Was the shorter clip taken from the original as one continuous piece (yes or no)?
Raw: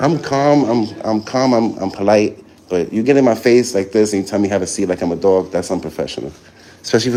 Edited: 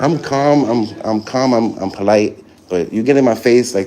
yes